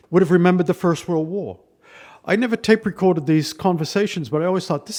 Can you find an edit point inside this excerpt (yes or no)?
no